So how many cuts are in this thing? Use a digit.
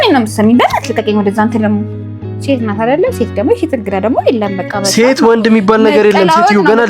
1